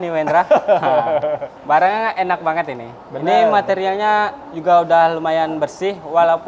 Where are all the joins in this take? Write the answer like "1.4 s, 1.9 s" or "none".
none